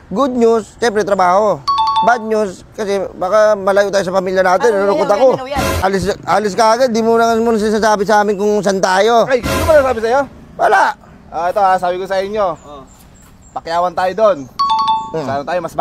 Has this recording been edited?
yes; 1 cut; at 5.8 s

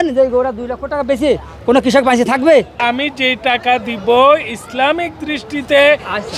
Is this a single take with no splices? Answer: no; 1 cut; at 2.8 s

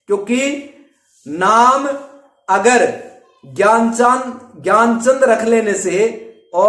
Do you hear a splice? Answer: no; 0 cuts

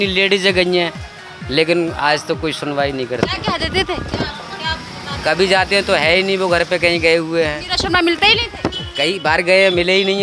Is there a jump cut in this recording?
no; 0 cuts

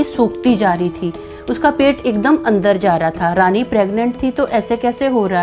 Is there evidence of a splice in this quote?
no; 0 cuts

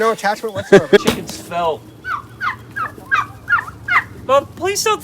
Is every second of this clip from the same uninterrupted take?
no; 1 cut; at 1.0 s

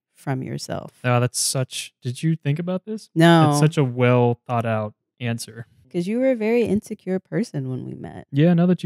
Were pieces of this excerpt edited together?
yes; 1 cut; at 5.9 s

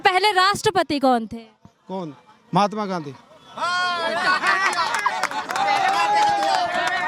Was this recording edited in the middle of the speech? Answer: no; 0 cuts

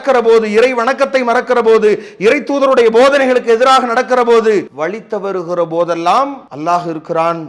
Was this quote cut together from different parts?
yes; 2 cuts; at 4.7 s, 6.5 s

